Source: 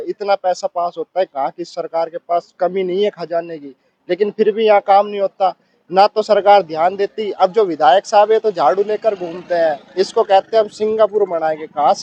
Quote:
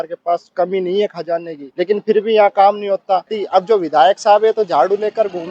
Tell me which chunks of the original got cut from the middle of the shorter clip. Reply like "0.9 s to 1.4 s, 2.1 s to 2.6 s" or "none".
3.6 s to 3.9 s, 5.7 s to 7.2 s